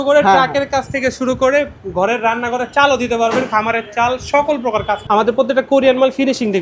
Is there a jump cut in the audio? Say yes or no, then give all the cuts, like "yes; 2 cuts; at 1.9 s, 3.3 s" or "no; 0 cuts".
yes; 1 cut; at 5.0 s